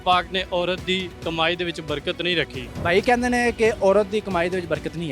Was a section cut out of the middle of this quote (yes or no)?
yes